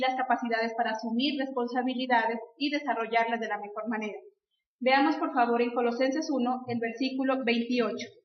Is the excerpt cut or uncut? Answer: uncut